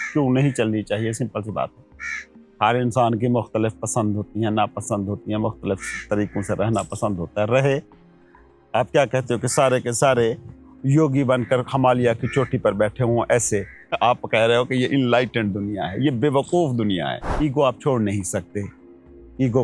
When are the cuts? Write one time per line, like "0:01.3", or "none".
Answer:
0:13.8
0:17.2